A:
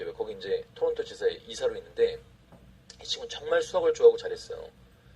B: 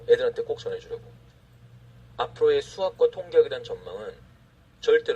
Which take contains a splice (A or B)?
B